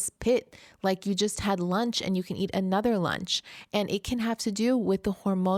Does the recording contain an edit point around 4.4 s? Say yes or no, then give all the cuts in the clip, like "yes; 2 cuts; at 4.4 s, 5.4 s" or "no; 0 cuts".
no; 0 cuts